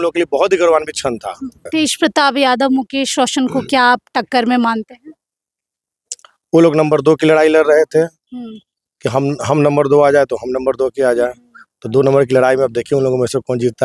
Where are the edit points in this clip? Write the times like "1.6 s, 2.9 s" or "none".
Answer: 1.5 s

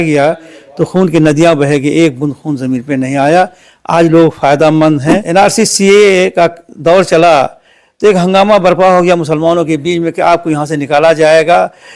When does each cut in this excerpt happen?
5.2 s

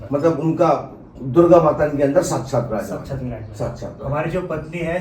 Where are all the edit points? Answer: none

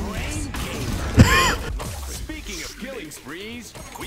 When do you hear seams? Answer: none

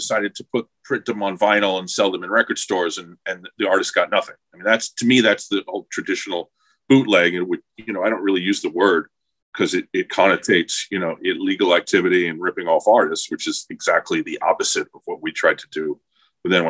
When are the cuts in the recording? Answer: none

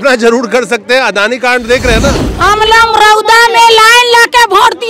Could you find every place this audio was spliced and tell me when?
2.3 s

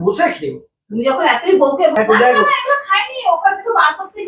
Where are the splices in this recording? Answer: 1.9 s

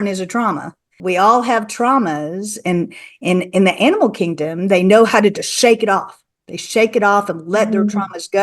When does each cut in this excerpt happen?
0.9 s

